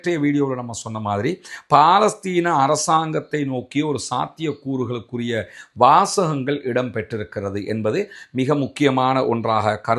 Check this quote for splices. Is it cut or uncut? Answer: uncut